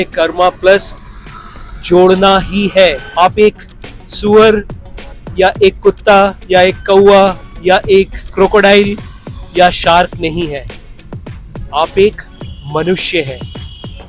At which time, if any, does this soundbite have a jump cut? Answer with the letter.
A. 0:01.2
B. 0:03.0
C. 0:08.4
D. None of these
B